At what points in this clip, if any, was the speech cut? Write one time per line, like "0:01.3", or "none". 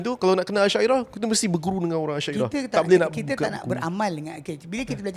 none